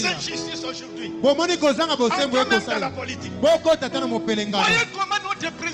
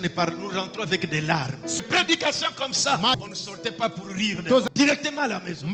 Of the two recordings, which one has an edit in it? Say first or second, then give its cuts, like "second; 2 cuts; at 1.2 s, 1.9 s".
second; 3 cuts; at 1.8 s, 3.2 s, 4.7 s